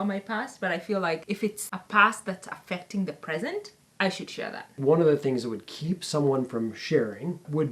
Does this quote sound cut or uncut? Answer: cut